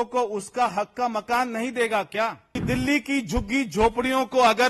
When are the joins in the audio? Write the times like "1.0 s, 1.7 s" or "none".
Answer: 2.5 s